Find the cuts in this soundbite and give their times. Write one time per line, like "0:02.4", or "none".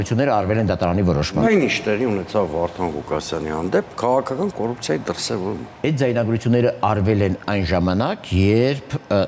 0:01.5
0:05.7